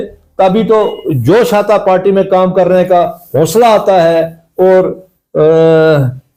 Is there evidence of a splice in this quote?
no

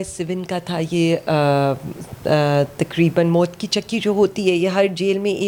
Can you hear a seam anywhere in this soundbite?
no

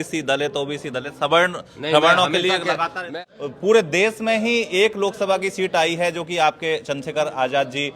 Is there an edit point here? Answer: yes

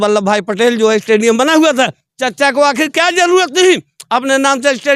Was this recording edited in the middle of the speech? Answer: no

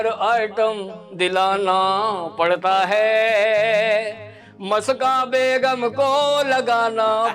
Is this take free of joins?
yes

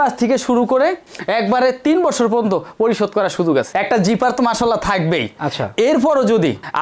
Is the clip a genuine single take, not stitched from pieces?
no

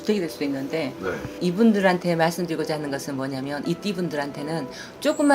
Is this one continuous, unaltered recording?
no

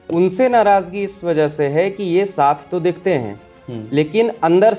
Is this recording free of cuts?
yes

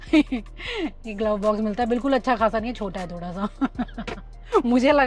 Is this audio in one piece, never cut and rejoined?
yes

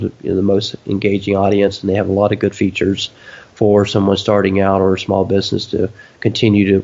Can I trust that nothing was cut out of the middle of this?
yes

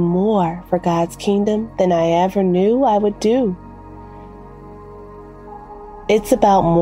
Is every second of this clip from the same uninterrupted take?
yes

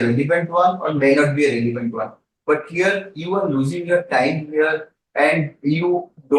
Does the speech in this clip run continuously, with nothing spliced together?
yes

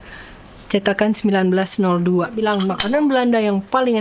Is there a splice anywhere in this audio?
yes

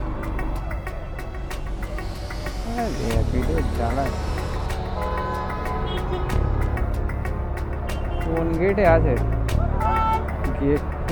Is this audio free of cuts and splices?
yes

